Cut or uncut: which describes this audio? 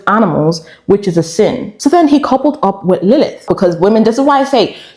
cut